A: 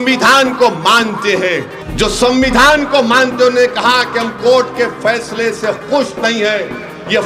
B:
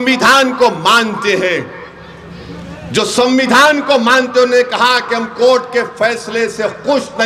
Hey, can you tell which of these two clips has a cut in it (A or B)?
A